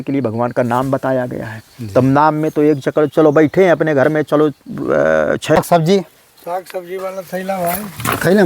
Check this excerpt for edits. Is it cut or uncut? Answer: cut